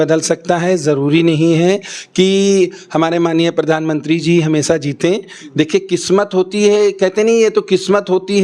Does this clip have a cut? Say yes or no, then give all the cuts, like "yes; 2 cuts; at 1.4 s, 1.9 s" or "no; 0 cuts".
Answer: no; 0 cuts